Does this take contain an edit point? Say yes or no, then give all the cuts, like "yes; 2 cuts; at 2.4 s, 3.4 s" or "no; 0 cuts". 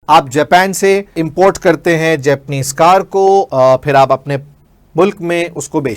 yes; 2 cuts; at 1.2 s, 3.5 s